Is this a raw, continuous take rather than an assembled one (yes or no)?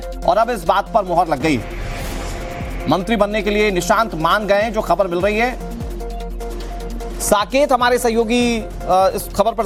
yes